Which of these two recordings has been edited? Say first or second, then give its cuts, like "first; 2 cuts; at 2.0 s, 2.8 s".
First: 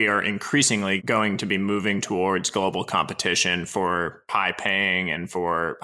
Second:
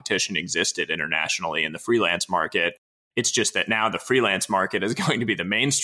first; 2 cuts; at 1.0 s, 4.3 s